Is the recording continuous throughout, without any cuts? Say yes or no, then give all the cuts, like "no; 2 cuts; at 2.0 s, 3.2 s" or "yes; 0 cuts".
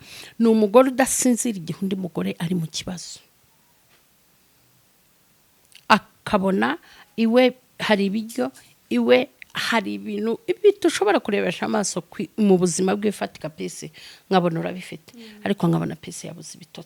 yes; 0 cuts